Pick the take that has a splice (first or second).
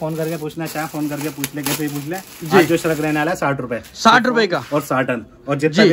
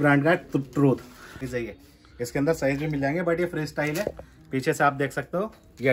second